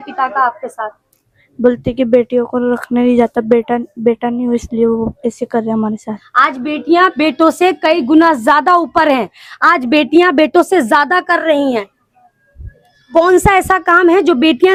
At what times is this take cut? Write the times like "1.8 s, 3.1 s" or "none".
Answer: none